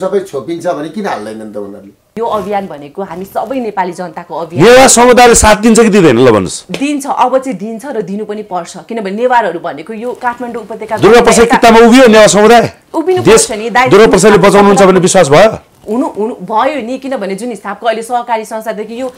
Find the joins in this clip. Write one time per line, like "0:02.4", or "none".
0:02.1